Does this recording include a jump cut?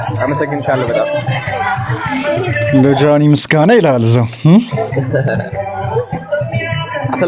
no; 0 cuts

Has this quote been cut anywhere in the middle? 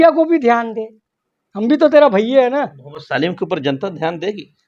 no; 0 cuts

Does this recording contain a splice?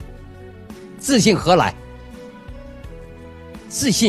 yes; 1 cut; at 1.0 s

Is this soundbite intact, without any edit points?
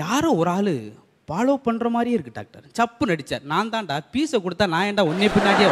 yes; 0 cuts

